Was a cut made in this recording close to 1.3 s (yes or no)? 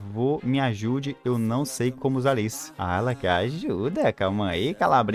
no